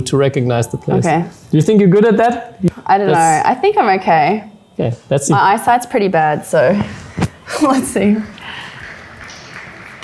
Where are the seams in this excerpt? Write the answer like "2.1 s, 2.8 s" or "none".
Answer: 2.6 s